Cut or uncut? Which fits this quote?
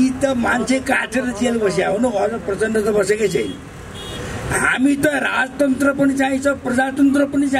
uncut